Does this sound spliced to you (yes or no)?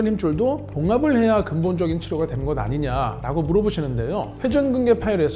yes